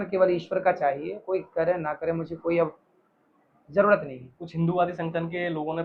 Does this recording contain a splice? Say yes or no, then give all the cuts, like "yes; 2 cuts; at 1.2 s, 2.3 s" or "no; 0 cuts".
no; 0 cuts